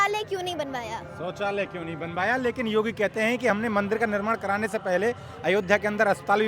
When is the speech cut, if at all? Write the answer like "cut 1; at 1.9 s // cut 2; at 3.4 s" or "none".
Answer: none